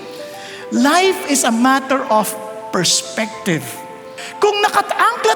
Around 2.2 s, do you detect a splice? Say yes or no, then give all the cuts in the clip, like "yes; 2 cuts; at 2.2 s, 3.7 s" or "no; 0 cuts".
no; 1 cut; at 4.2 s